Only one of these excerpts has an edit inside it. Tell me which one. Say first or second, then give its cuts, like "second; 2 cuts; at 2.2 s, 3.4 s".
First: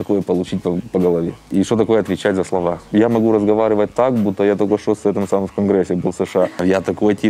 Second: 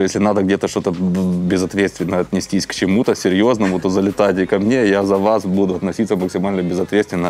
first; 3 cuts; at 1.4 s, 2.9 s, 6.5 s